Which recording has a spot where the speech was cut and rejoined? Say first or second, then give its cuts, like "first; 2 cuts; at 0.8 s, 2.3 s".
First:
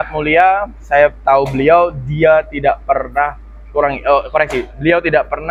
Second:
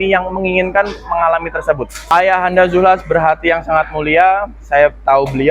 second; 1 cut; at 2.1 s